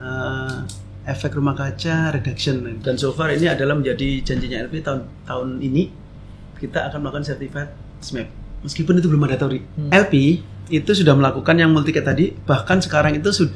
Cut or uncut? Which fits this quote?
cut